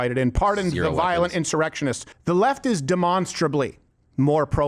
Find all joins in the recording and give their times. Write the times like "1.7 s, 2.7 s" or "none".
2.1 s